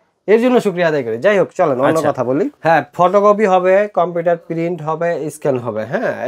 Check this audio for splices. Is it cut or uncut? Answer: cut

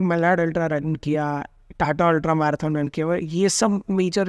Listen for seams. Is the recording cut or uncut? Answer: uncut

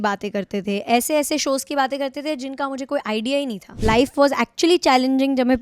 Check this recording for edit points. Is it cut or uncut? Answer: cut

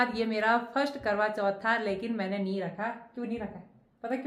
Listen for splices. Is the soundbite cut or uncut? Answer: uncut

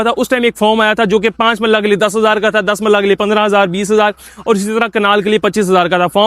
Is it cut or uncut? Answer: uncut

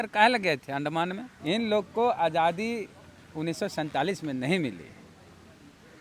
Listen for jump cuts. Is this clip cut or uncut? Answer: cut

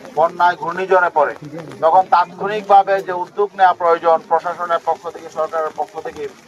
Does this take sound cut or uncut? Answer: uncut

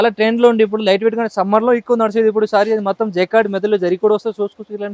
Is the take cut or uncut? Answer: uncut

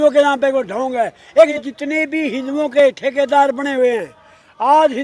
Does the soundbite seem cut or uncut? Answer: cut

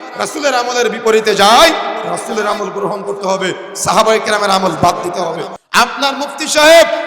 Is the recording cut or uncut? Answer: cut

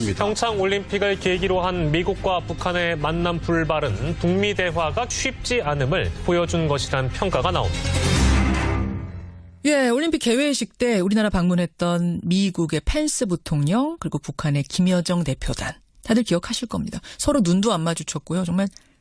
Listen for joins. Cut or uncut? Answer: uncut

